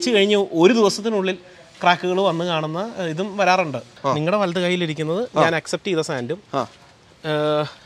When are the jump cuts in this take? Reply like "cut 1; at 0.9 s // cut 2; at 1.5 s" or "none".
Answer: cut 1; at 3.9 s